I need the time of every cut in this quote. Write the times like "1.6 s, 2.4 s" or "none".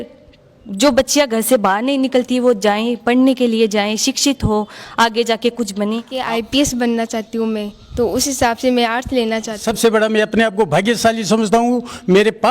6.1 s, 9.6 s